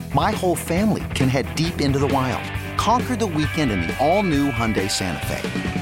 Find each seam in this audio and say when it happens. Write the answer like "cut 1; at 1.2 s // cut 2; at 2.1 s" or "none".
none